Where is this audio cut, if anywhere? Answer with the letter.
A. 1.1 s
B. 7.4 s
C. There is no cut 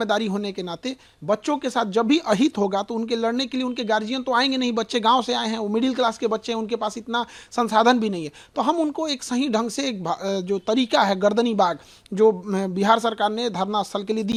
C